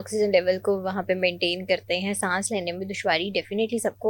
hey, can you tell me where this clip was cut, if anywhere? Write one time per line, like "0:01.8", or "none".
none